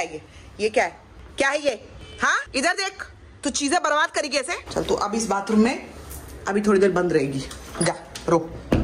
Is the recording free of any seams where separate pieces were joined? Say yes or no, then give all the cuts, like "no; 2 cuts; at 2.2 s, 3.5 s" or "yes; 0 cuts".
no; 2 cuts; at 2.4 s, 4.6 s